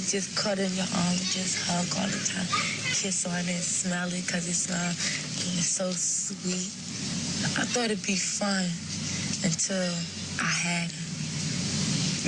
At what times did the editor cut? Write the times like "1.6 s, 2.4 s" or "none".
none